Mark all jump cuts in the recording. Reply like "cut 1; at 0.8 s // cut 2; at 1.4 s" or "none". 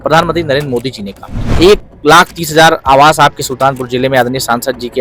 cut 1; at 1.5 s